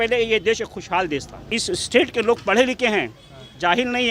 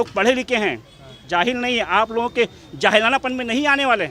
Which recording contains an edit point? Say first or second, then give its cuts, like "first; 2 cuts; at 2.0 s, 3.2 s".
first; 1 cut; at 1.4 s